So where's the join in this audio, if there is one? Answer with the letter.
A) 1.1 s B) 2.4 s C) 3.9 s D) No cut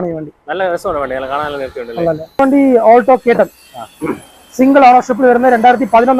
B